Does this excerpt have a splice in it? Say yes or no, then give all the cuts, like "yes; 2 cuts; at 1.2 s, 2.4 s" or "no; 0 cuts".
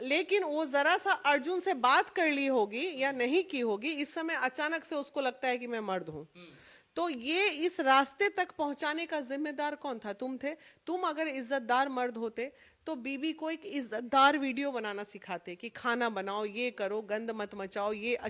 no; 0 cuts